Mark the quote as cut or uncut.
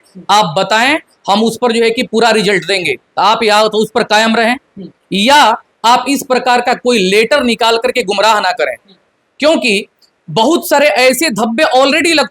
uncut